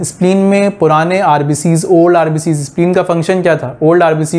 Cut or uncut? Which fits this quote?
uncut